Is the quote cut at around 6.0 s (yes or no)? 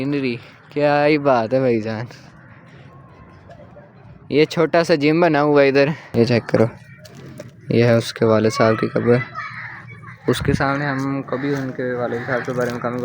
yes